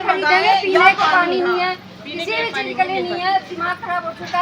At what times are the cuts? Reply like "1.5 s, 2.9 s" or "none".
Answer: none